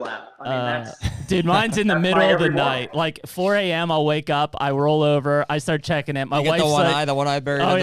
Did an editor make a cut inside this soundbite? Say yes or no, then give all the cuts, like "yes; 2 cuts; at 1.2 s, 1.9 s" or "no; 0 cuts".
no; 0 cuts